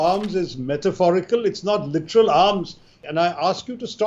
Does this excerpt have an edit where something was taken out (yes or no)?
yes